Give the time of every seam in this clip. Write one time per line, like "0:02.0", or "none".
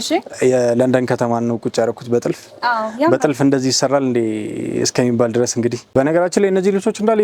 0:05.9